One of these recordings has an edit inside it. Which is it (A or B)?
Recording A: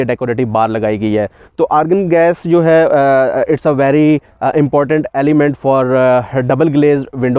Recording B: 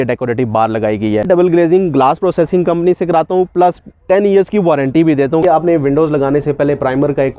B